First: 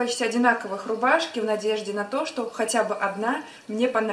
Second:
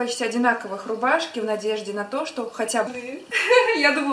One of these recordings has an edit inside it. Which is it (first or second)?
first